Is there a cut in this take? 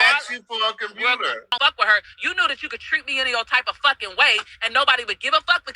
yes; 1 cut; at 1.5 s

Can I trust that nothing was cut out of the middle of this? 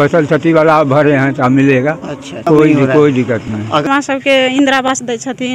no; 2 cuts; at 2.4 s, 3.9 s

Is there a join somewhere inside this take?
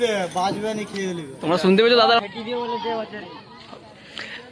yes; 1 cut; at 2.2 s

